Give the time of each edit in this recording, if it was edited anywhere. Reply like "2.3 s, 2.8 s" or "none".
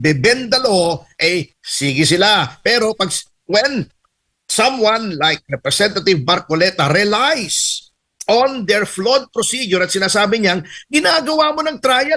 none